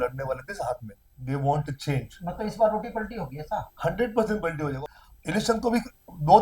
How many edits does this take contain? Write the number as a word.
two